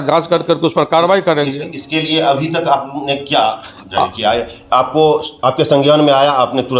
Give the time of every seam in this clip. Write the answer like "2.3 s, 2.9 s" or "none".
none